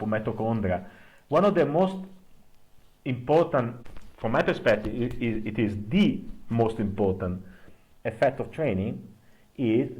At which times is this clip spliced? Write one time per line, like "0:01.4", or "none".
0:03.7